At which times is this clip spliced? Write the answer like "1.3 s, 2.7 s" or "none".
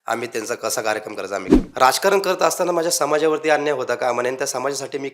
1.6 s